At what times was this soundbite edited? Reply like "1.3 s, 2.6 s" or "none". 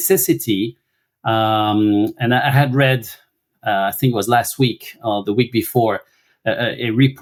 none